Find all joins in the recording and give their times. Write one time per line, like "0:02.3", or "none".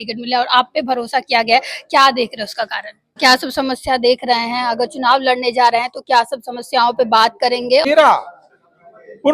0:03.2
0:07.9